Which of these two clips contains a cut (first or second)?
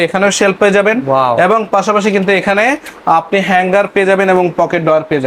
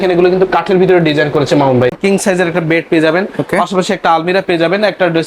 second